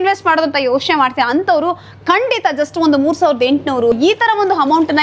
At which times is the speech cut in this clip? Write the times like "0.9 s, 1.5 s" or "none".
4.0 s